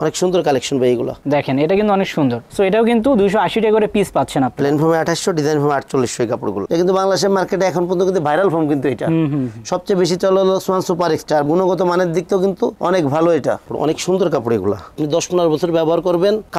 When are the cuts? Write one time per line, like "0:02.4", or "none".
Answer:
0:01.2
0:06.6
0:13.6